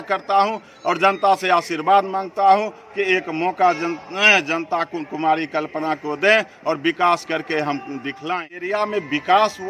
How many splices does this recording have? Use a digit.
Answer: 1